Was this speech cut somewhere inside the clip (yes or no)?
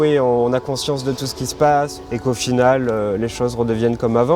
no